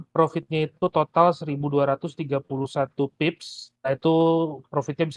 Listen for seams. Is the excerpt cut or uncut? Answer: uncut